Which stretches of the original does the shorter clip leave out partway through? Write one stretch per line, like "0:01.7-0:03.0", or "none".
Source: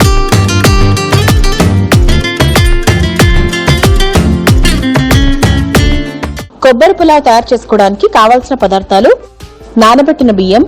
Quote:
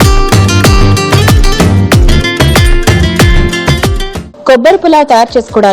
0:04.0-0:06.2